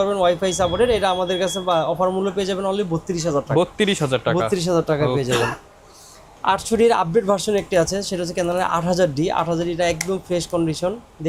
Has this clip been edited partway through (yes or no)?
no